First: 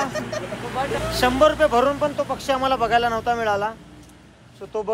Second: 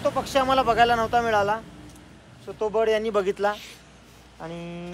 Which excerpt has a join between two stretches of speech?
first; 1 cut; at 1.0 s

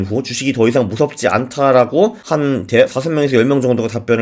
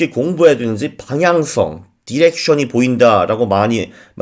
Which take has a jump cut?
first; 1 cut; at 2.2 s

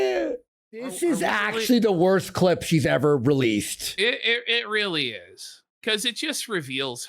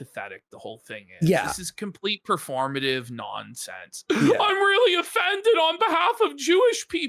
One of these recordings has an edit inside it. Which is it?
first; 1 cut; at 0.9 s

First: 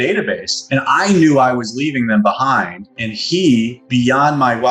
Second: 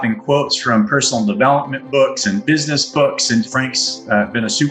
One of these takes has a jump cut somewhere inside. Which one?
second; 1 cut; at 3.5 s

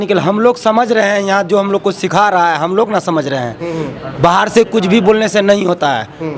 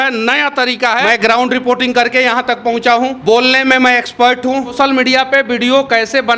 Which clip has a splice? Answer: second; 3 cuts; at 1.1 s, 3.2 s, 4.8 s

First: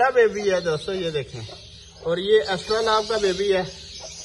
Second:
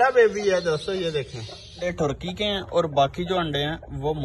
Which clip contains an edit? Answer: second; 1 cut; at 1.8 s

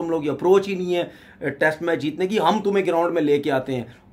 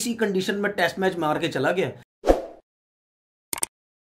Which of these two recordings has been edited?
second; 1 cut; at 2.0 s

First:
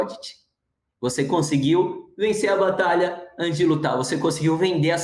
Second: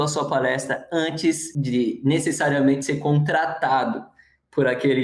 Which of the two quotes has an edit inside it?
second; 1 cut; at 1.5 s

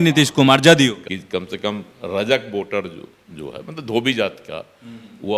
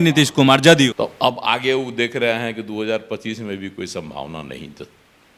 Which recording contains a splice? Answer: second; 1 cut; at 0.9 s

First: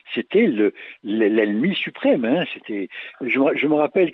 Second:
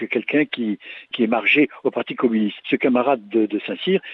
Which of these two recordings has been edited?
second; 2 cuts; at 1.1 s, 2.6 s

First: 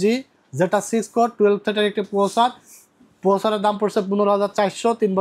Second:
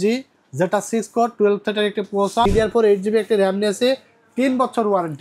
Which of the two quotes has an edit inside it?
second; 1 cut; at 2.5 s

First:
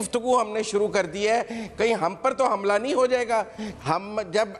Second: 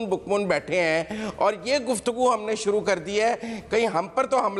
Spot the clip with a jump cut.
first; 1 cut; at 3.6 s

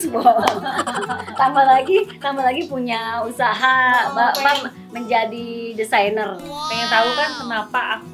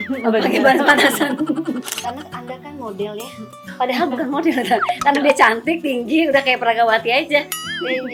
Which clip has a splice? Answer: second; 1 cut; at 1.9 s

